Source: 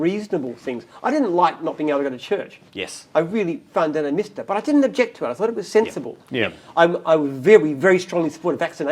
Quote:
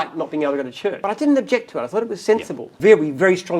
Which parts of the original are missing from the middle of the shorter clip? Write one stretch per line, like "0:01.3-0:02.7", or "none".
0:02.5-0:04.5
0:06.2-0:07.3